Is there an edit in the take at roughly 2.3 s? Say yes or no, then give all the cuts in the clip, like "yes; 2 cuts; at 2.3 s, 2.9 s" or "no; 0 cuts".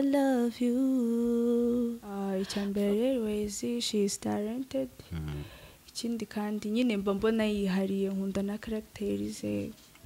yes; 1 cut; at 2.3 s